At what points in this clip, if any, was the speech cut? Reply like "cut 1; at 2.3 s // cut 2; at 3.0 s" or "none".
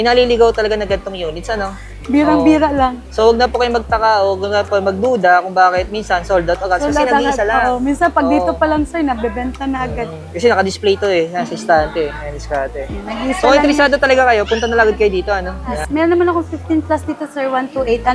cut 1; at 15.8 s